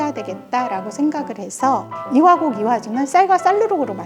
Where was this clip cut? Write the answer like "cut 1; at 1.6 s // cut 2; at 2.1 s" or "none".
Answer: cut 1; at 1.9 s